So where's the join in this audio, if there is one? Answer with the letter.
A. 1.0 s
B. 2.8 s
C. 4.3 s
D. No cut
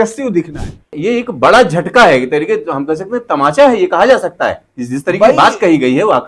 A